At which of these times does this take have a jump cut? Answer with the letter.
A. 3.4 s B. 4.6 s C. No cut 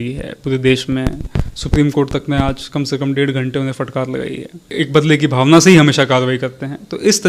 B